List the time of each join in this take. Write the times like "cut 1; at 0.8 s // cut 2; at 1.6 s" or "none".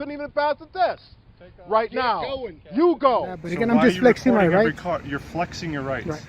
cut 1; at 3.4 s